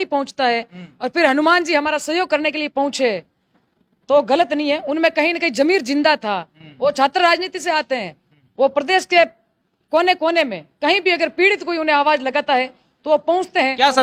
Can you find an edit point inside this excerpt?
no; 0 cuts

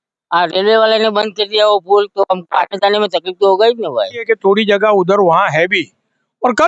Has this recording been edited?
yes; 1 cut; at 4.2 s

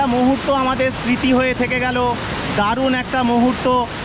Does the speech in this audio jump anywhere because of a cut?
no; 0 cuts

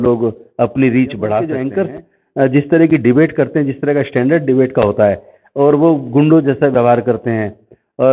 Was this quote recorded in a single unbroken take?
no; 1 cut; at 1.5 s

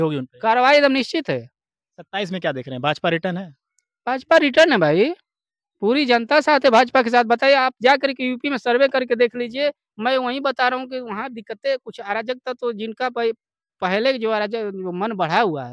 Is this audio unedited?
yes; 0 cuts

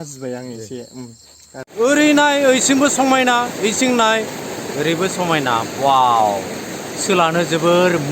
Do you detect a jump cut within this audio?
yes; 1 cut; at 1.7 s

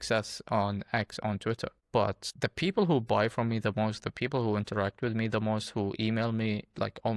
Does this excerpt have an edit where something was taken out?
yes; 1 cut; at 2.2 s

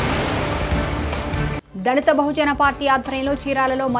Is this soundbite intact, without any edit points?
no; 1 cut; at 1.2 s

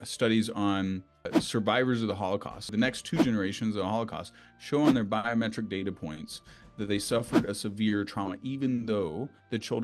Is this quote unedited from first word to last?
no; 2 cuts; at 1.3 s, 2.8 s

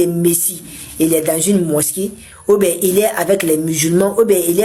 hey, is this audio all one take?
yes; 0 cuts

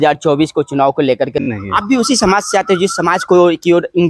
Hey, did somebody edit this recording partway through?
yes; 1 cut; at 1.5 s

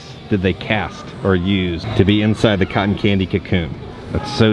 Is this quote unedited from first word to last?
yes; 0 cuts

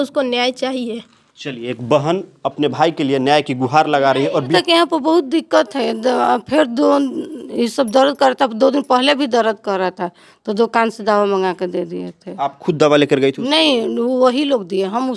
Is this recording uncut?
no; 1 cut; at 4.5 s

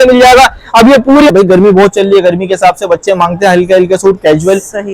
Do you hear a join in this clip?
yes; 1 cut; at 1.3 s

